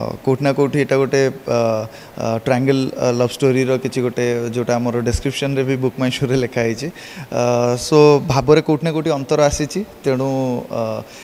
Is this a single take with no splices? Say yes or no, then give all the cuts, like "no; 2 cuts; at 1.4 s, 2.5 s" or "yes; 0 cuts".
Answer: yes; 0 cuts